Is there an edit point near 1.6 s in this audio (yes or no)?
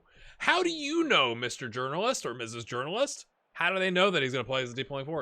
no